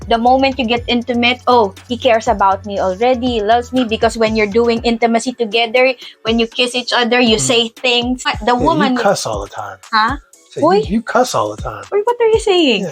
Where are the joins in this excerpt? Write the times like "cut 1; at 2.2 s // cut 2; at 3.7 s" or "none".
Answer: cut 1; at 8.3 s